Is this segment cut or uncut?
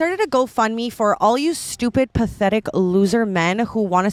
uncut